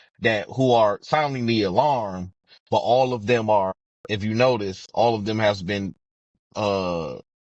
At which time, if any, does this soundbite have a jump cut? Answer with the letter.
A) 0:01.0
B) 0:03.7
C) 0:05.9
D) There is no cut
B